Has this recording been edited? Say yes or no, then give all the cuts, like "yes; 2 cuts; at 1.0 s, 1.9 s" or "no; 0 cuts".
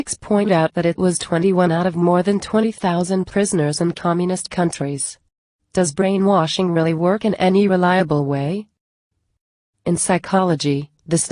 yes; 1 cut; at 4.7 s